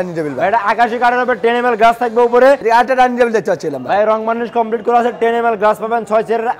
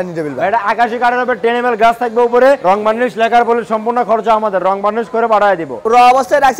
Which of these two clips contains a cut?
first; 1 cut; at 2.6 s

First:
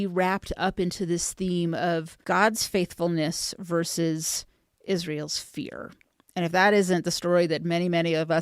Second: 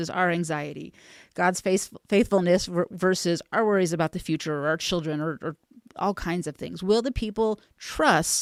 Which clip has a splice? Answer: first; 1 cut; at 2.1 s

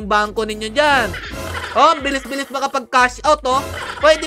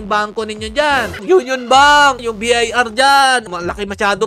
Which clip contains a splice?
second; 3 cuts; at 1.2 s, 2.2 s, 3.5 s

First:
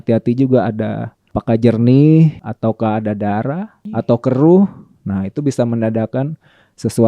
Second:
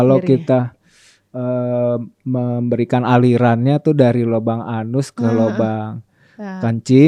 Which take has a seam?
first; 3 cuts; at 1.3 s, 2.5 s, 3.7 s

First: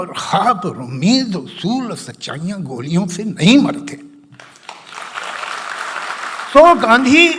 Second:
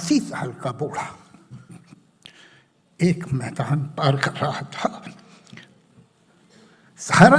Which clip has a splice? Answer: first; 1 cut; at 6.5 s

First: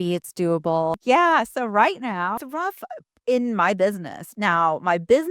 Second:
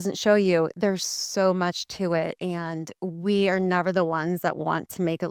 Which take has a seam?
first; 2 cuts; at 1.0 s, 2.4 s

